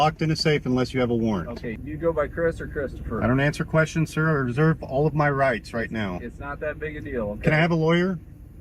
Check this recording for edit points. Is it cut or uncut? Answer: cut